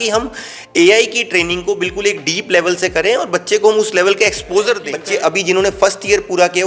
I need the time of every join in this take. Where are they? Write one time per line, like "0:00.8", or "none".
0:04.9